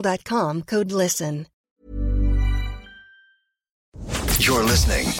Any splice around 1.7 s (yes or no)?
yes